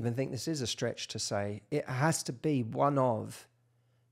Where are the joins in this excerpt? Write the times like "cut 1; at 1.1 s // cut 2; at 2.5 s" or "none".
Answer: cut 1; at 1.6 s